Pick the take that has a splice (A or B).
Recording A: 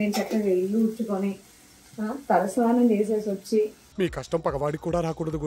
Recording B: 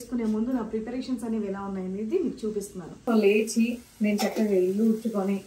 B